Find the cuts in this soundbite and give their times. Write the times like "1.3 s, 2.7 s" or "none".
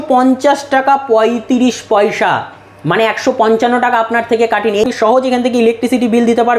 4.9 s